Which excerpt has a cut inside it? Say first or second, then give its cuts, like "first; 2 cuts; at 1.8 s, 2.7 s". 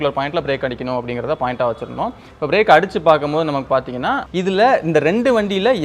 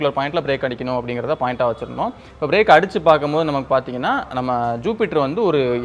first; 1 cut; at 4.2 s